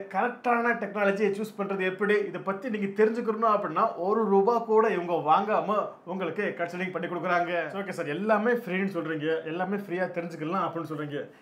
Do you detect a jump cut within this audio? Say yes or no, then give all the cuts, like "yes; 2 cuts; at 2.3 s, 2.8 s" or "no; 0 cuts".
yes; 1 cut; at 7.7 s